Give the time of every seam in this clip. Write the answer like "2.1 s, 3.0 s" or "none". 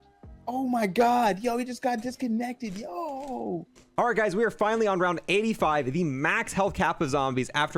3.7 s